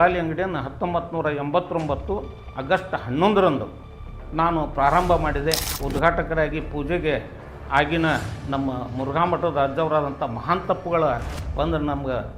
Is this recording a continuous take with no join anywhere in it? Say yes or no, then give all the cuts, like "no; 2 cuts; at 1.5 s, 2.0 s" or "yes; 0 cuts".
no; 1 cut; at 5.7 s